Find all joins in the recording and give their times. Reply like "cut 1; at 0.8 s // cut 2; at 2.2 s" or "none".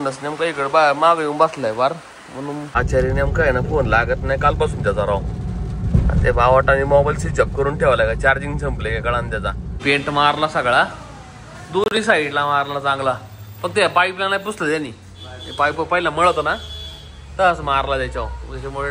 cut 1; at 2.6 s // cut 2; at 9.7 s